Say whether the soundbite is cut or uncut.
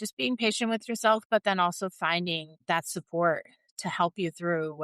cut